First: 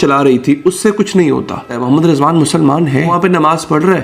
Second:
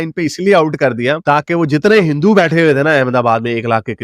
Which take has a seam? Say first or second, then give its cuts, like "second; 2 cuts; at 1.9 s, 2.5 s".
first; 2 cuts; at 1.7 s, 3.1 s